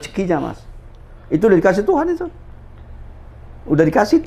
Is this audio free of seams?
yes; 0 cuts

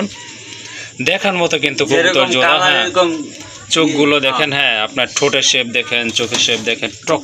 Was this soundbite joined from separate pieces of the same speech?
no; 0 cuts

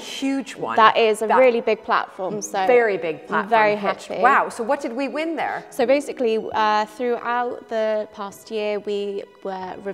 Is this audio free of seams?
yes; 0 cuts

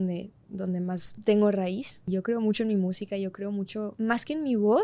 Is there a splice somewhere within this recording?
yes; 3 cuts; at 1.1 s, 2.0 s, 3.9 s

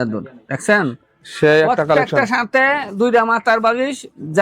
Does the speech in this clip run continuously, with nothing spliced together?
yes; 0 cuts

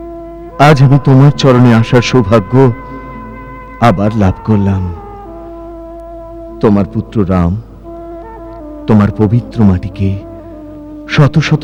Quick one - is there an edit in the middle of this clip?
no; 0 cuts

